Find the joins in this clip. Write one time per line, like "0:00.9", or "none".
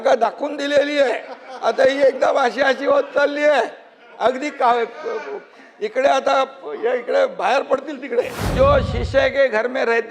0:08.5